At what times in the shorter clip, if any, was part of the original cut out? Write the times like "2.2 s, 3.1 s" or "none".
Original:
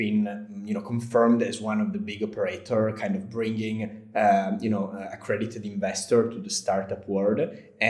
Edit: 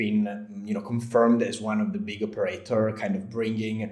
none